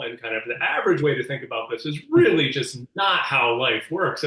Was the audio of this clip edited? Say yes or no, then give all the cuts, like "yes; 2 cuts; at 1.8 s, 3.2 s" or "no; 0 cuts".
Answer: no; 0 cuts